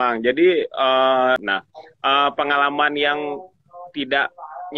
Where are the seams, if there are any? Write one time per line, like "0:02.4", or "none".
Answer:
0:01.4